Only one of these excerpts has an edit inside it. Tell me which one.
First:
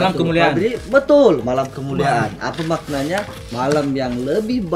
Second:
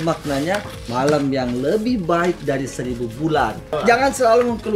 second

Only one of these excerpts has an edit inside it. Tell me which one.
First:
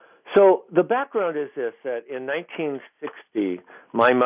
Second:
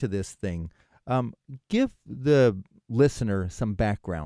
second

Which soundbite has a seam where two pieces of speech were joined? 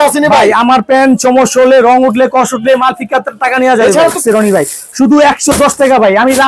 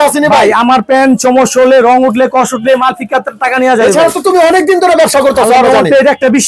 first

